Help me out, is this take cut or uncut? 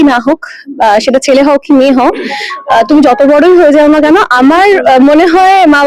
uncut